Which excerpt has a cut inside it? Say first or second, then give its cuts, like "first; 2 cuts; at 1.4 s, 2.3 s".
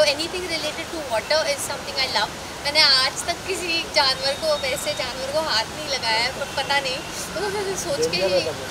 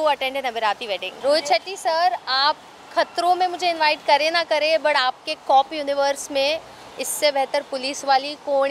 second; 1 cut; at 1.2 s